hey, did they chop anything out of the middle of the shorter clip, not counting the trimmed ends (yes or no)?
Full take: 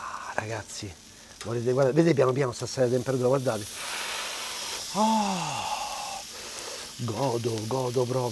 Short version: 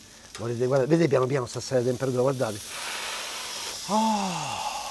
no